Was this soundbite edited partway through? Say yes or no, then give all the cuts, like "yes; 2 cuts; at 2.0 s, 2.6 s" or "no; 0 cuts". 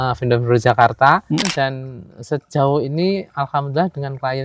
yes; 1 cut; at 1.4 s